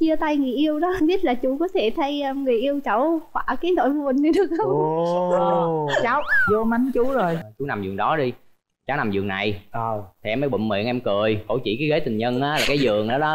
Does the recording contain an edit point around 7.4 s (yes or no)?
yes